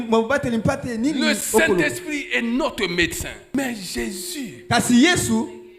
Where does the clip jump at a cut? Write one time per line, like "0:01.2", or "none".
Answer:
0:03.5